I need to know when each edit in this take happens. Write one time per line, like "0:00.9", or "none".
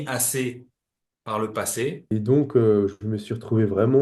0:02.0